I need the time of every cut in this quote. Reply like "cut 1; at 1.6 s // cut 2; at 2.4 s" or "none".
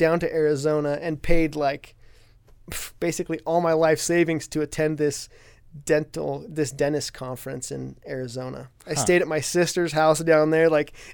none